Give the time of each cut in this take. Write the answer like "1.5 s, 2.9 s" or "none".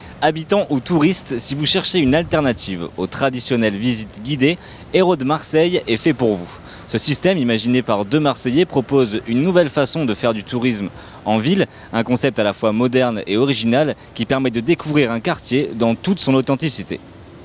none